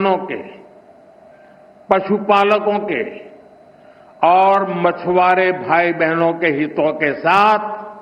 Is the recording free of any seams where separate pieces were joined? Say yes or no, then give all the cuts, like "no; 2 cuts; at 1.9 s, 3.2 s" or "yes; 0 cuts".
yes; 0 cuts